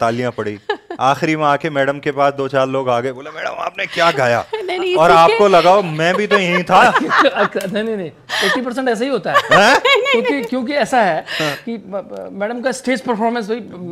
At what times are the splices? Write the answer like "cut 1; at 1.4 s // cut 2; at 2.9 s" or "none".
none

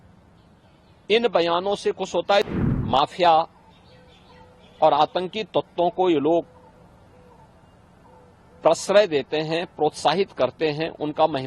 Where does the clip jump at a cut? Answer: cut 1; at 2.5 s

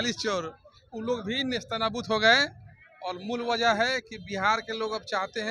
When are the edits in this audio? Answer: none

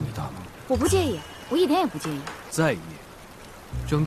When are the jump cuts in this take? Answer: cut 1; at 2.4 s

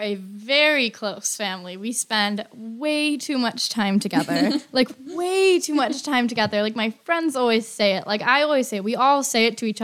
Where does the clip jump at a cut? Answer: none

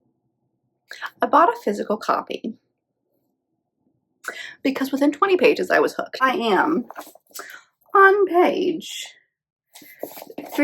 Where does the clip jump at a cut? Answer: cut 1; at 6.2 s

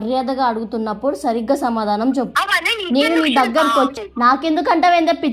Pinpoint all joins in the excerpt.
cut 1; at 2.3 s // cut 2; at 3.9 s

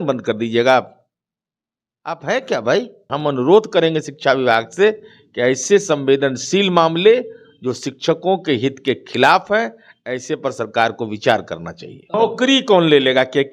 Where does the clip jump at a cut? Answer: cut 1; at 3.1 s // cut 2; at 12.1 s

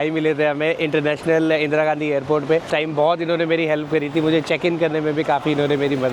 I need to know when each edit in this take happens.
cut 1; at 2.7 s

